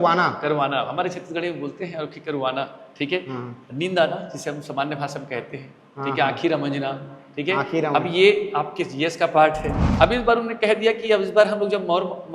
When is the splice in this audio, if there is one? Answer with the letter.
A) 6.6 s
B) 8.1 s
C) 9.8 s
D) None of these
C